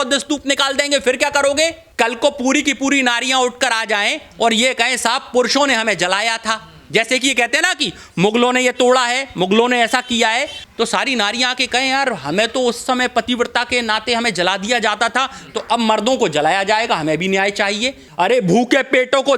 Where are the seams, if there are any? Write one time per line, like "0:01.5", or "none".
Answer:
0:01.8
0:10.6
0:18.0